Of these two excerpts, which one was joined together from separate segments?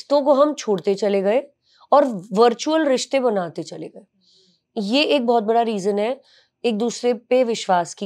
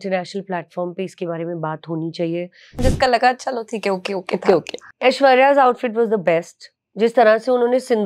second; 1 cut; at 2.8 s

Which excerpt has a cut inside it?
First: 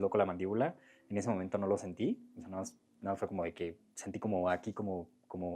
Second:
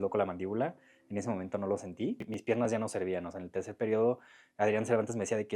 second; 1 cut; at 2.3 s

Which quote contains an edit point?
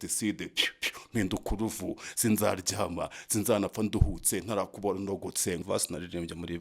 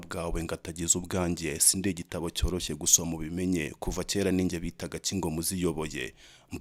first; 1 cut; at 5.6 s

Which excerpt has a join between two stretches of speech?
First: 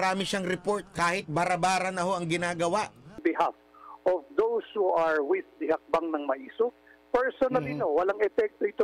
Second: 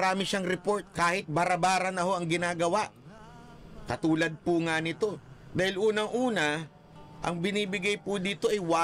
first; 1 cut; at 3.2 s

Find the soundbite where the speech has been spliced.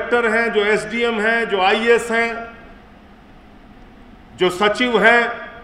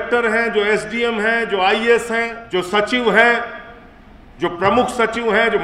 second; 1 cut; at 2.4 s

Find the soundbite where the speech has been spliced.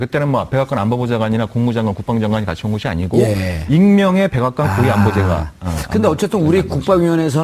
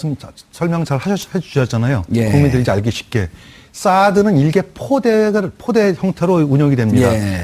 second; 1 cut; at 2.6 s

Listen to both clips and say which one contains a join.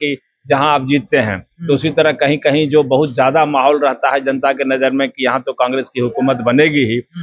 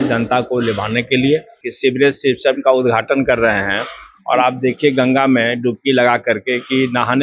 second; 1 cut; at 1.6 s

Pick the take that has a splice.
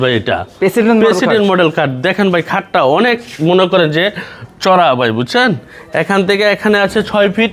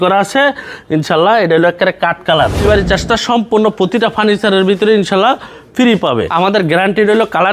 second; 2 cuts; at 2.6 s, 6.3 s

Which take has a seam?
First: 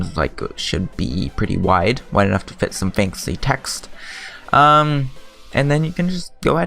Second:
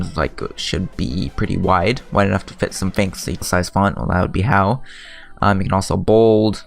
first; 1 cut; at 3.4 s

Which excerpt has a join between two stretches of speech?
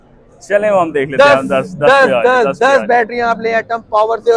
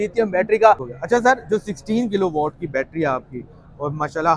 second; 1 cut; at 0.9 s

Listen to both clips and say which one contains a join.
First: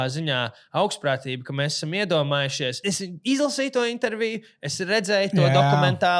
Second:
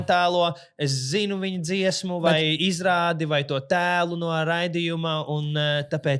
first; 1 cut; at 2.8 s

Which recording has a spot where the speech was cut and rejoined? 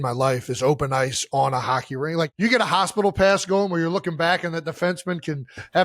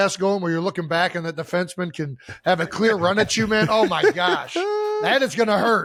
first; 1 cut; at 2.3 s

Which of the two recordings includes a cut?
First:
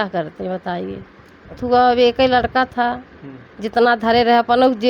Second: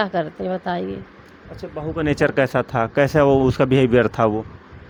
first; 1 cut; at 1.6 s

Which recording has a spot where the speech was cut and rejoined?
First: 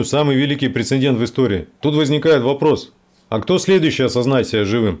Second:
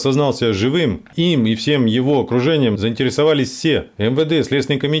second; 3 cuts; at 1.1 s, 2.8 s, 3.9 s

